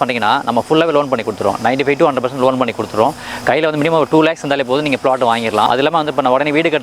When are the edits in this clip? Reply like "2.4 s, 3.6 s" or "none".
5.7 s